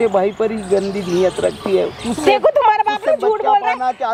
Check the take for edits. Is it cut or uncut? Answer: uncut